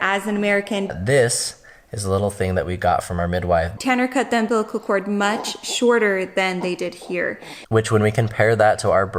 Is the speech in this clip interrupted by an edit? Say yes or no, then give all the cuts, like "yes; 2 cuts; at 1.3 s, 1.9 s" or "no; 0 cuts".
yes; 3 cuts; at 0.9 s, 3.7 s, 7.6 s